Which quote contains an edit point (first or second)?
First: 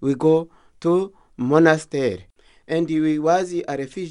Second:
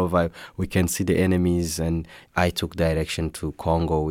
second